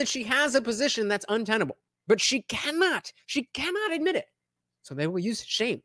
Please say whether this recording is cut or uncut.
cut